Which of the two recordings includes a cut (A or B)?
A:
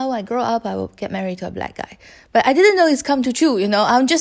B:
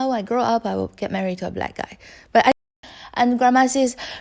B